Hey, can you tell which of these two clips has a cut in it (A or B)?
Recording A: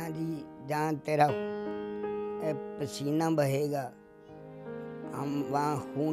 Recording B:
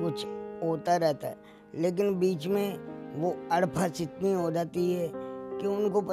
A